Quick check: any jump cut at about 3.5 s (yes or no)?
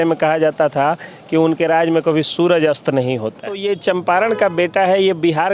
yes